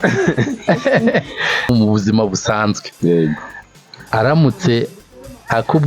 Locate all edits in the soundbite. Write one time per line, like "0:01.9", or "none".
0:01.7